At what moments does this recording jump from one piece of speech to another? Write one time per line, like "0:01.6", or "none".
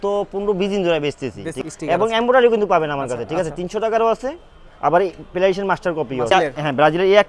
0:01.5
0:06.3